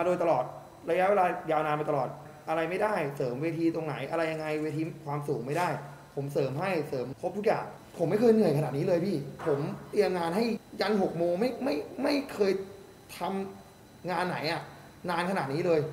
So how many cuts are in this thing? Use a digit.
4